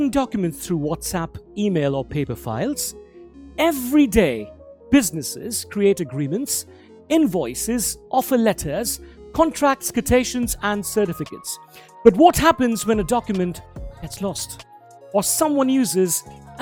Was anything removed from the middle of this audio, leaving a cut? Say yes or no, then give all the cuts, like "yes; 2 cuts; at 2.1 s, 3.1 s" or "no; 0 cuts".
no; 0 cuts